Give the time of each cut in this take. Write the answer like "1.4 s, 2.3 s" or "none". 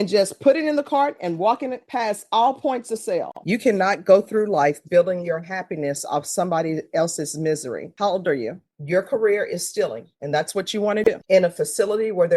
3.3 s, 8.7 s, 11.1 s